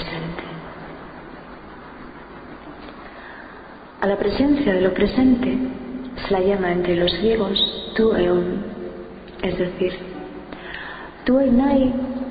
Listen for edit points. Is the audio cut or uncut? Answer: cut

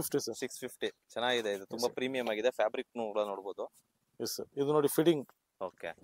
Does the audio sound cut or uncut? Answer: uncut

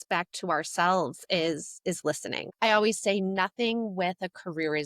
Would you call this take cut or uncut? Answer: cut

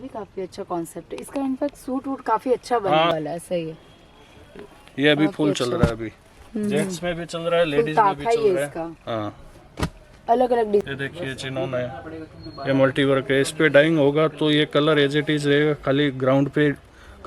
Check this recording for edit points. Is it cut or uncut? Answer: cut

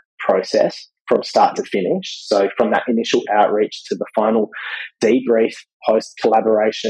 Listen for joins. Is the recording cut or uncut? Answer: uncut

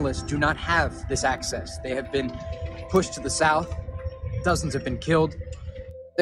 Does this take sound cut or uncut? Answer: cut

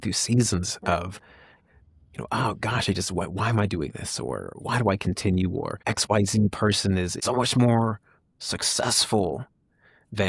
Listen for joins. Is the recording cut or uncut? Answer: cut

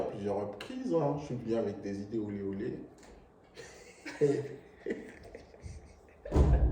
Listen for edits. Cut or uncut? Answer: uncut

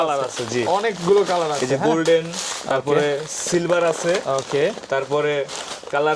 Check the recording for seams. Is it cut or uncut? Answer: uncut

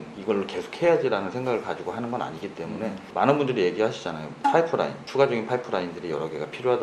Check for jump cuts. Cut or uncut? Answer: uncut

